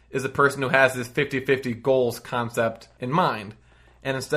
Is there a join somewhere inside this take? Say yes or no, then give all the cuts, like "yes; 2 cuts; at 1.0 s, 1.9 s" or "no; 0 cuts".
yes; 1 cut; at 2.9 s